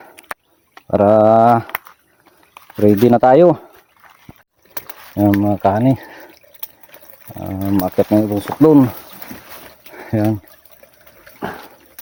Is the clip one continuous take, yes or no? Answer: yes